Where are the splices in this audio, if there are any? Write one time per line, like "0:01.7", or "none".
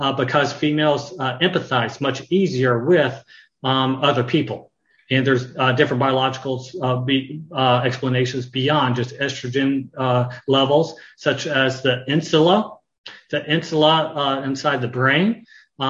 none